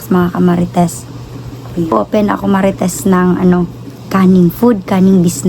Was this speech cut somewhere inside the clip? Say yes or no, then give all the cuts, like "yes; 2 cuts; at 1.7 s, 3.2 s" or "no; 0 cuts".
yes; 1 cut; at 1.9 s